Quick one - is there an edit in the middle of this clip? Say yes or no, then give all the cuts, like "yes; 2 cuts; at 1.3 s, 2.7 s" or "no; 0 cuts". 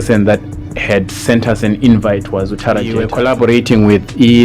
yes; 1 cut; at 3.0 s